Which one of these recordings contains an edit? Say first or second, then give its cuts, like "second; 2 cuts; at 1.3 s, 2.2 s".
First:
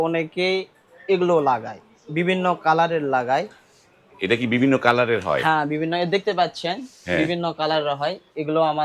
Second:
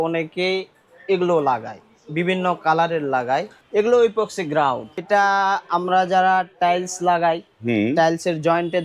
second; 2 cuts; at 3.6 s, 5.0 s